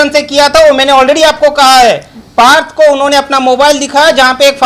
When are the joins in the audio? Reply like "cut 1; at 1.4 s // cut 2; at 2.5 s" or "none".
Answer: none